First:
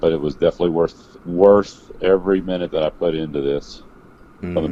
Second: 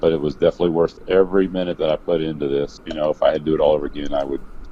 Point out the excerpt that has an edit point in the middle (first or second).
second